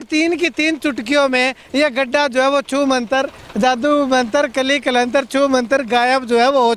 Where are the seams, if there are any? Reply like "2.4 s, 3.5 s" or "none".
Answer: none